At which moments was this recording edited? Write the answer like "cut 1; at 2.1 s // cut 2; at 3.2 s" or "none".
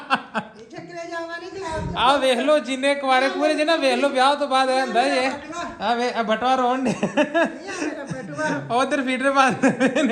none